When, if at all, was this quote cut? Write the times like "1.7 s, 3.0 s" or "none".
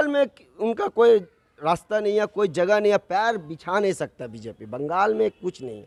none